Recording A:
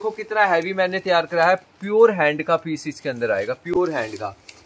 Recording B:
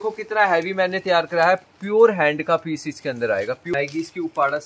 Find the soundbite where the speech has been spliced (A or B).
B